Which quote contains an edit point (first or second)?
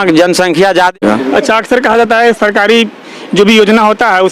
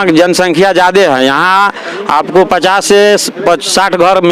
first